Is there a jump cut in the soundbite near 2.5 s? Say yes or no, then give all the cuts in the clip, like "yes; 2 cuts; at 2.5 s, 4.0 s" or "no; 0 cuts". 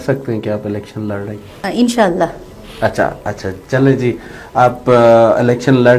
no; 0 cuts